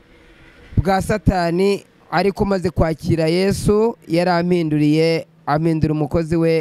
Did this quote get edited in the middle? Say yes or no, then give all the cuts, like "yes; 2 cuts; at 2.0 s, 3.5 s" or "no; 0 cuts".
no; 0 cuts